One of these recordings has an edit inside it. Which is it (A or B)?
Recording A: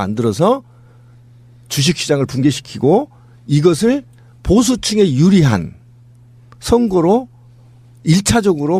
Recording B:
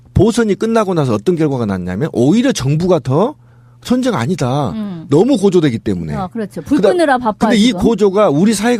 A